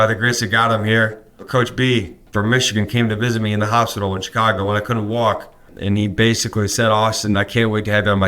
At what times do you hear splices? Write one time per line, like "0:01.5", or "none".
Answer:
0:01.3
0:02.2
0:05.7